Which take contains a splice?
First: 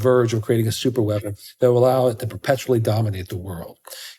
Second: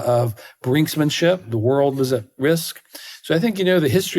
second; 1 cut; at 1.4 s

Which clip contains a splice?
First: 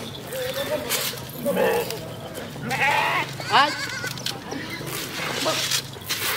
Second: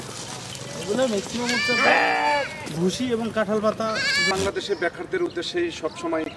second; 1 cut; at 4.3 s

